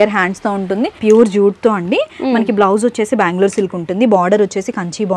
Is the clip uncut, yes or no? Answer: no